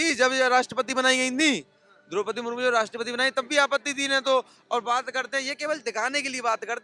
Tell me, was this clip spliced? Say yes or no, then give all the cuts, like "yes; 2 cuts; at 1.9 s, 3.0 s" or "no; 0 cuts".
no; 0 cuts